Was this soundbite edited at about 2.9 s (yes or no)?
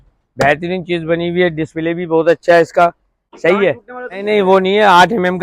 no